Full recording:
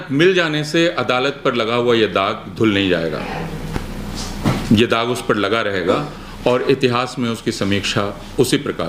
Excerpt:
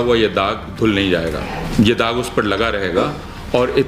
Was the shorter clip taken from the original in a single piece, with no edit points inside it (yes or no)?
no